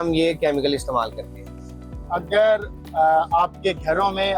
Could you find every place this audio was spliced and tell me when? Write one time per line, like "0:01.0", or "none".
none